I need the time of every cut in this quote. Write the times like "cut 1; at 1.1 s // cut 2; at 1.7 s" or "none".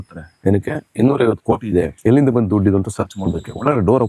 cut 1; at 1.9 s